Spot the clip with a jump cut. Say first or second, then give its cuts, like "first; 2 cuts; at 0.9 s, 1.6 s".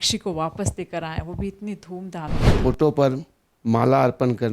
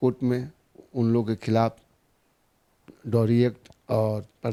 first; 1 cut; at 2.4 s